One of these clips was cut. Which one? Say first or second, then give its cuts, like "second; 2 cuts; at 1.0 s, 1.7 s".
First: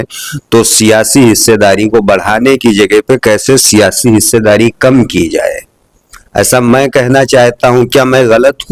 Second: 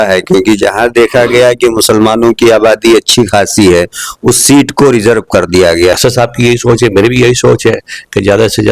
second; 1 cut; at 6.0 s